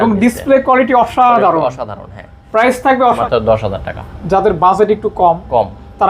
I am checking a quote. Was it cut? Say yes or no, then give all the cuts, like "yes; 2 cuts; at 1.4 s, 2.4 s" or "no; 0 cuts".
yes; 1 cut; at 3.2 s